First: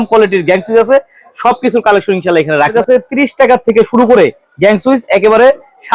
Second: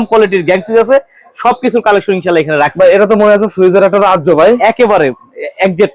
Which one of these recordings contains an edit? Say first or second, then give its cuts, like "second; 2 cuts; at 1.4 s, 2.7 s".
first; 1 cut; at 2.7 s